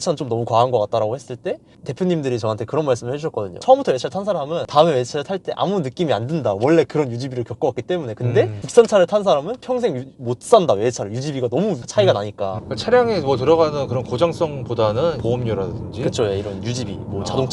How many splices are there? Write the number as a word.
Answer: zero